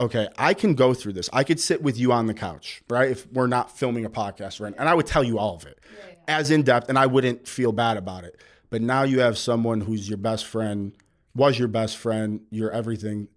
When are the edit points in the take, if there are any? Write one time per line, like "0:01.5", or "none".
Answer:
none